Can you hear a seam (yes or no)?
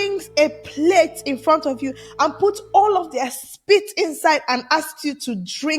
no